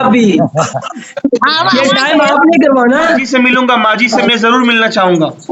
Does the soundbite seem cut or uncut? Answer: uncut